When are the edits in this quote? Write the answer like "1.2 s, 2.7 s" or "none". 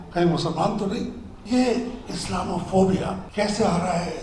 1.3 s, 3.2 s